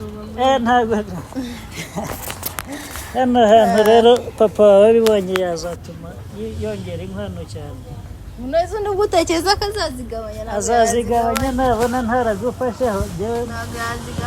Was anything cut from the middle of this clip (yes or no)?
no